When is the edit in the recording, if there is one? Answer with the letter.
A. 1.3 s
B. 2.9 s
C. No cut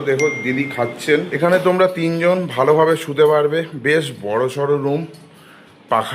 A